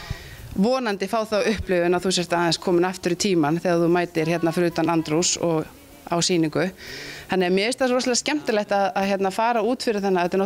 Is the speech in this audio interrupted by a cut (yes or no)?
no